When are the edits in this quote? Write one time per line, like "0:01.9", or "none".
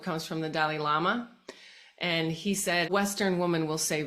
0:02.9